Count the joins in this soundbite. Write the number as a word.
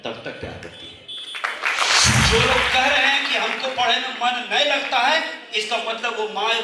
one